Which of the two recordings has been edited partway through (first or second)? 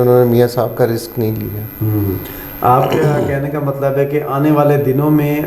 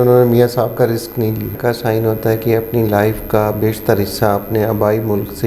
second